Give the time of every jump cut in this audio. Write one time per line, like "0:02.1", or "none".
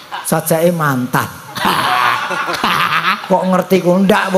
none